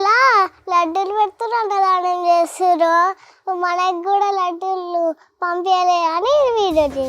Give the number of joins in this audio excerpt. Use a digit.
0